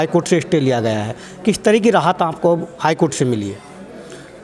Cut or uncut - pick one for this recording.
uncut